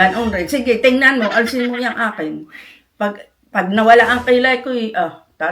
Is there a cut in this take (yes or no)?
no